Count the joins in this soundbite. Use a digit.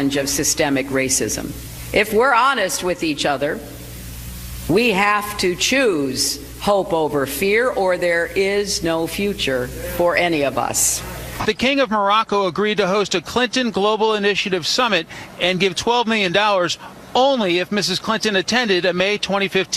1